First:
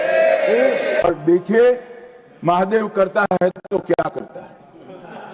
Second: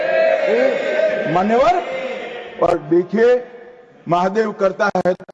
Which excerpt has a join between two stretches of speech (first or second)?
first